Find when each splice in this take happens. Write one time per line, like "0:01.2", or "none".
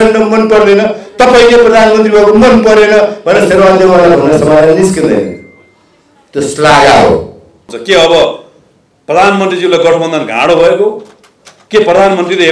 0:07.7